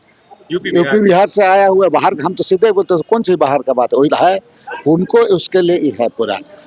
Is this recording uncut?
yes; 0 cuts

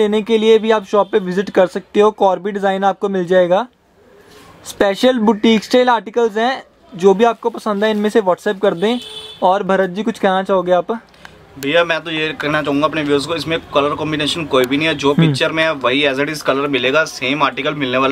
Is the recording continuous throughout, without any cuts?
yes; 0 cuts

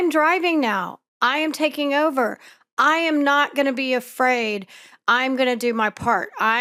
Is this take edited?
no; 0 cuts

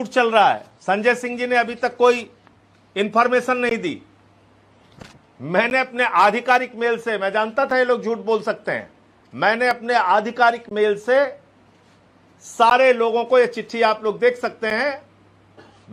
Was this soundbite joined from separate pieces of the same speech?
no; 0 cuts

